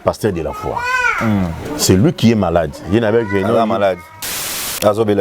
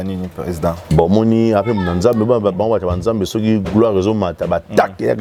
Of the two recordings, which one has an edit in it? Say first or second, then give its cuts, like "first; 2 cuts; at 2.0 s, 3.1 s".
first; 1 cut; at 4.3 s